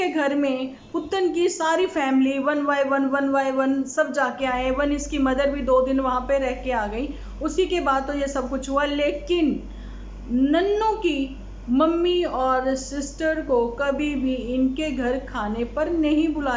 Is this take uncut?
yes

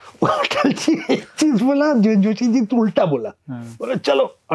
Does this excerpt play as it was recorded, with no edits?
yes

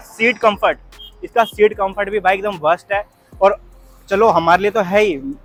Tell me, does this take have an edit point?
no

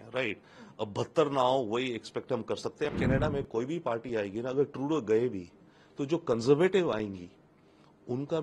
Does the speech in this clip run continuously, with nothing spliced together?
no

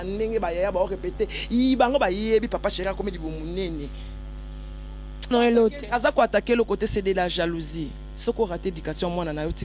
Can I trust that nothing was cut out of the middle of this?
no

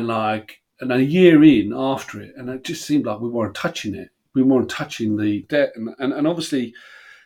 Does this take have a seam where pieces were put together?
yes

